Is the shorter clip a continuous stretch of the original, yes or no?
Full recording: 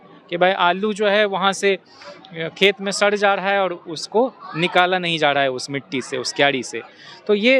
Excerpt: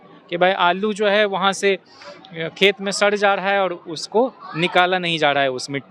yes